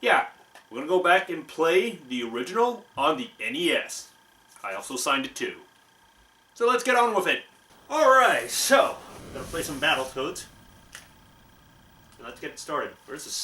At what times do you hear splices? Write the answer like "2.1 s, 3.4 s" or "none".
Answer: none